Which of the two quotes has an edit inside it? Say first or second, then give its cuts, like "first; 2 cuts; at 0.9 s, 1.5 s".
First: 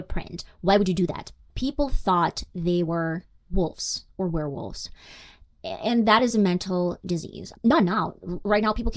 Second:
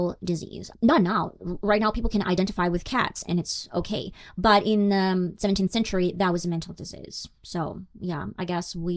first; 1 cut; at 1.5 s